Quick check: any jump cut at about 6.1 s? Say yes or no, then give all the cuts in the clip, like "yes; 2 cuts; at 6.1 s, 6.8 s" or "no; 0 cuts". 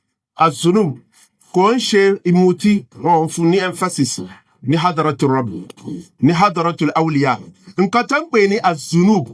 no; 0 cuts